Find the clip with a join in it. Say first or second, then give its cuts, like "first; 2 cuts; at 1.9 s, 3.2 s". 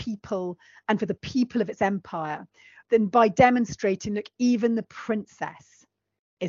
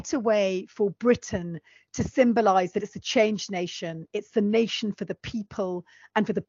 first; 1 cut; at 2.7 s